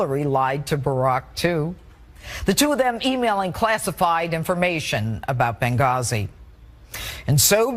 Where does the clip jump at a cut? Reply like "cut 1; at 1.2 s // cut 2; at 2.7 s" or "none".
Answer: cut 1; at 5.2 s